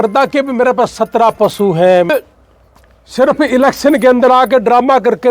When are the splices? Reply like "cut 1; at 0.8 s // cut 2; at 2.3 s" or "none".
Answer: cut 1; at 2.1 s